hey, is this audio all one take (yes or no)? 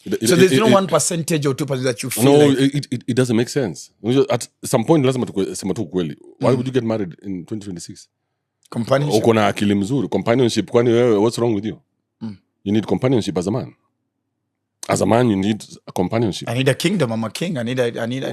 yes